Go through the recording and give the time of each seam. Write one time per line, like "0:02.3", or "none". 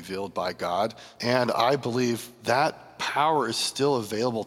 0:01.1
0:02.3
0:02.9